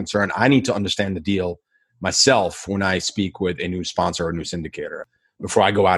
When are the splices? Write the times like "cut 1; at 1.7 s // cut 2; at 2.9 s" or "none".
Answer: cut 1; at 5.0 s

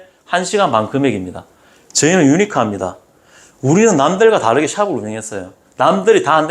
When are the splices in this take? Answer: cut 1; at 1.7 s

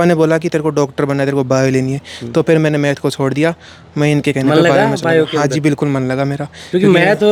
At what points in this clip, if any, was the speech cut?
none

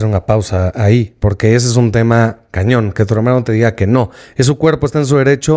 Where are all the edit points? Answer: none

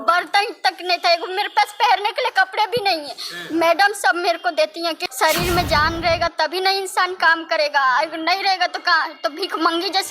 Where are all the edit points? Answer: cut 1; at 5.0 s

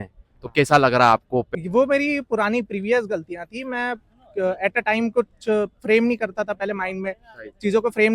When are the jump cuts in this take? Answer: cut 1; at 1.5 s

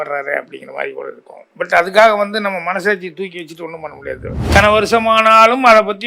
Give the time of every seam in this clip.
cut 1; at 4.4 s

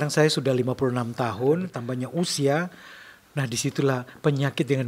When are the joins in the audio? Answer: cut 1; at 1.8 s

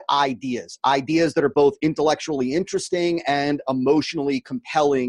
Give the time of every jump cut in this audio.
none

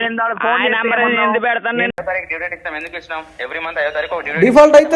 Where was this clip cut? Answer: cut 1; at 1.9 s

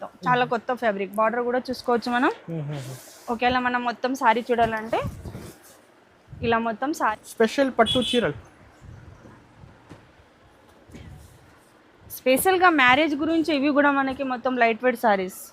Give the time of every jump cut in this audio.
cut 1; at 7.1 s

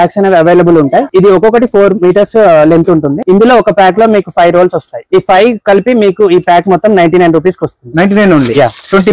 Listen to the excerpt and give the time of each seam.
cut 1; at 1.1 s // cut 2; at 3.2 s // cut 3; at 5.0 s

